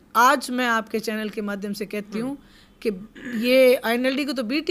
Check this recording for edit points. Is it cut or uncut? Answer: uncut